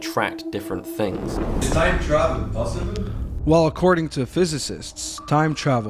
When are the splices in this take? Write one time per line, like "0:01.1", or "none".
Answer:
0:01.6